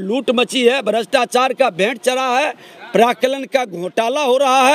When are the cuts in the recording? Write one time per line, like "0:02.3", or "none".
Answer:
none